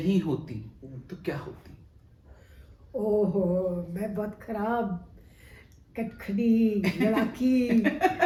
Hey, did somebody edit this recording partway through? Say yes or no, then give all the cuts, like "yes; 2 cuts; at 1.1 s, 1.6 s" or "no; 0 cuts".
no; 0 cuts